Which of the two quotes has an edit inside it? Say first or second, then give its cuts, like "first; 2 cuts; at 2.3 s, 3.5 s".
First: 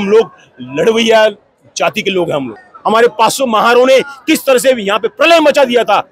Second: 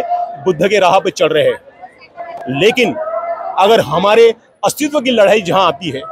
first; 1 cut; at 2.6 s